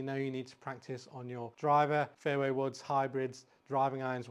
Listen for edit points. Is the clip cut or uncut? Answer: cut